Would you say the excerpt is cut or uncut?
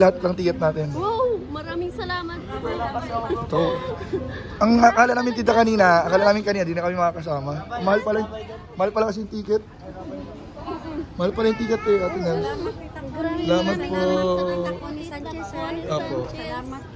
uncut